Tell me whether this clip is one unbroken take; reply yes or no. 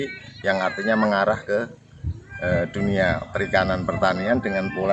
yes